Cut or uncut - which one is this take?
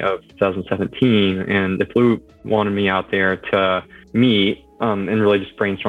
cut